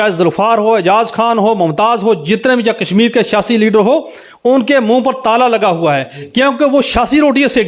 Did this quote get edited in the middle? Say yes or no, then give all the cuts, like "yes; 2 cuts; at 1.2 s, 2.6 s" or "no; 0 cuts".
no; 0 cuts